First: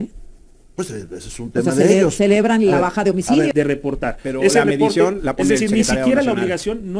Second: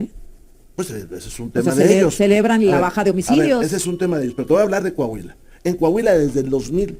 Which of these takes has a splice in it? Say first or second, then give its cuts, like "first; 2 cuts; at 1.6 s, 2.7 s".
first; 1 cut; at 3.5 s